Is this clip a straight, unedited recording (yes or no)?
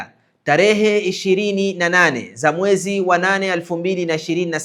yes